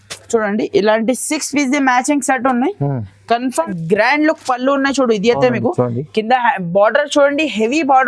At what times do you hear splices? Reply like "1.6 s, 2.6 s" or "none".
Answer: 3.7 s